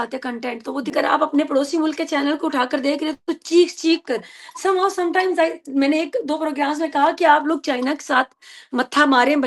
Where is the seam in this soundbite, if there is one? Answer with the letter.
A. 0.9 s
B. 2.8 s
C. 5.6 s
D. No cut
A